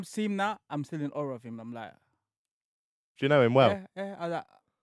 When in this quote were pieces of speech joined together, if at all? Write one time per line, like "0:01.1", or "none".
0:03.1